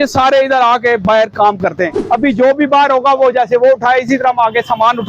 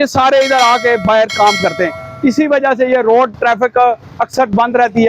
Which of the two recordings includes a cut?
first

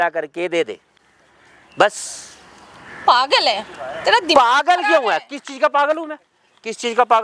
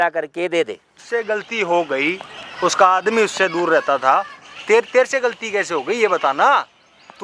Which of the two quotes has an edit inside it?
second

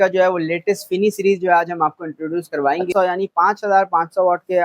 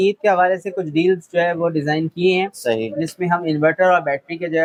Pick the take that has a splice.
first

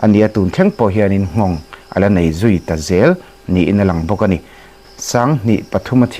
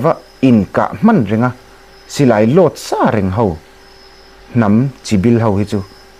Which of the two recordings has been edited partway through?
first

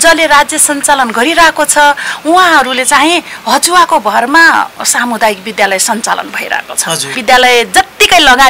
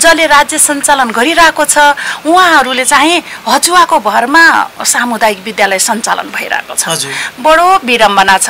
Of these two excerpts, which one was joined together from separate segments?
first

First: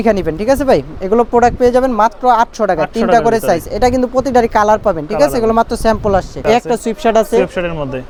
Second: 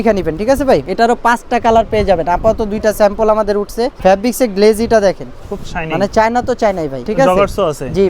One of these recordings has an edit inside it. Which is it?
second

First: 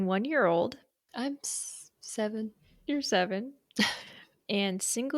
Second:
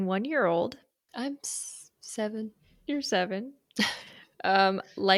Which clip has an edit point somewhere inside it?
first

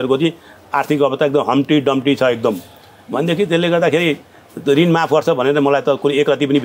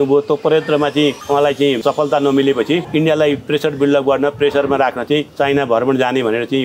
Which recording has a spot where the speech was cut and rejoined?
second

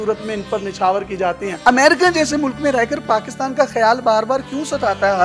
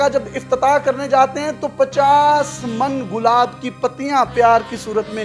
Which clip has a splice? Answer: first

